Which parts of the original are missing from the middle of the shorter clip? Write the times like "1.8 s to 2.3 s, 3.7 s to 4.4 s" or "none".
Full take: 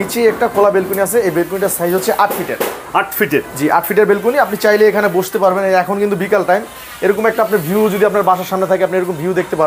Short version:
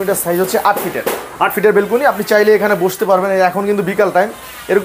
3.1 s to 3.9 s